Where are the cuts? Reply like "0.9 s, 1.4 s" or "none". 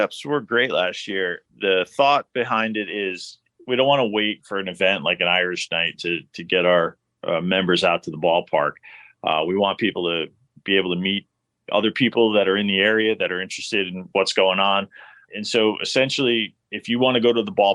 1.4 s, 3.5 s, 14.0 s, 15.2 s